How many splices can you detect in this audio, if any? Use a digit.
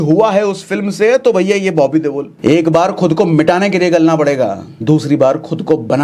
2